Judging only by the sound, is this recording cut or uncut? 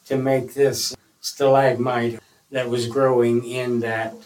cut